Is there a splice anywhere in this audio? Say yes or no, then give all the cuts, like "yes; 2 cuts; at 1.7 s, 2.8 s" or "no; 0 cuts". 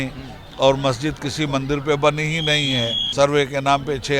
yes; 1 cut; at 3.0 s